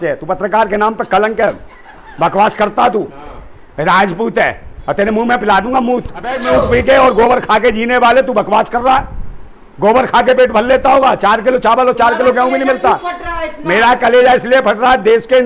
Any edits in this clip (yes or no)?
yes